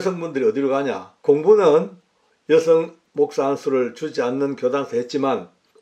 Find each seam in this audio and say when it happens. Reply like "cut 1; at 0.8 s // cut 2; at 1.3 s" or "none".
cut 1; at 1.1 s